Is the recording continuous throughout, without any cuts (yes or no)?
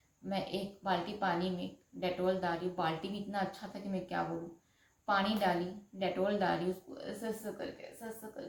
yes